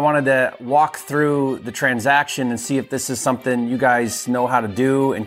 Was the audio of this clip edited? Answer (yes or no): no